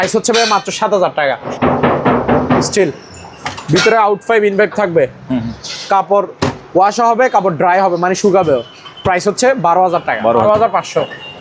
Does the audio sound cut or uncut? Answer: cut